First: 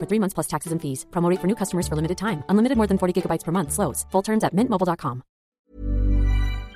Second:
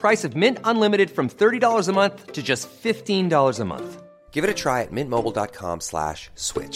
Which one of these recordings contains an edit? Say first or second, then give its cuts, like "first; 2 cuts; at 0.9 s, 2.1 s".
first; 1 cut; at 5.6 s